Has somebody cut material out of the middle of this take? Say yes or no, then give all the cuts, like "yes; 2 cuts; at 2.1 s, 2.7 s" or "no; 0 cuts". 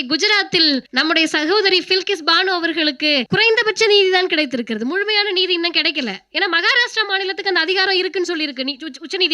yes; 2 cuts; at 0.9 s, 3.3 s